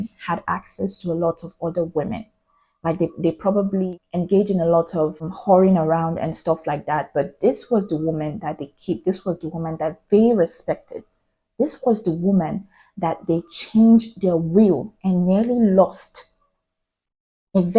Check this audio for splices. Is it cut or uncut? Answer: uncut